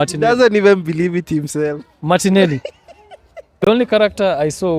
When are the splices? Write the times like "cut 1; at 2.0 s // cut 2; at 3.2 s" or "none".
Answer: cut 1; at 3.7 s